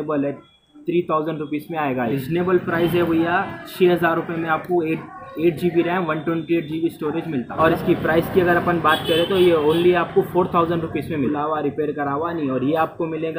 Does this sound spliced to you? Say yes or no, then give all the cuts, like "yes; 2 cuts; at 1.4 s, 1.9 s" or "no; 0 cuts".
yes; 3 cuts; at 2.1 s, 7.5 s, 11.3 s